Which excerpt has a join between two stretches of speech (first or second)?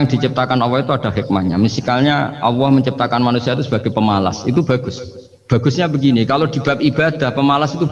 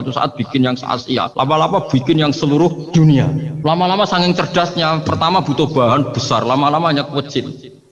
second